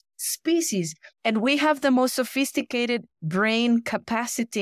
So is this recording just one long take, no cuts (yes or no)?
no